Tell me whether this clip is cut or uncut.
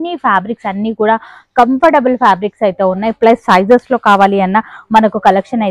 uncut